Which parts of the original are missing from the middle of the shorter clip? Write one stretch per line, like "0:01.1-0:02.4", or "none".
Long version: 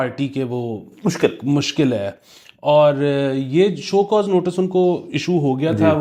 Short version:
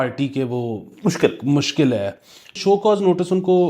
0:02.5-0:03.8